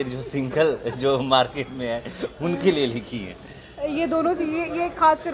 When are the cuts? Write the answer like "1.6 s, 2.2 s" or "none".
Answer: none